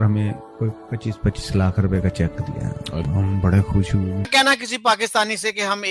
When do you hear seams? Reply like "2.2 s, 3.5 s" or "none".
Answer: 4.3 s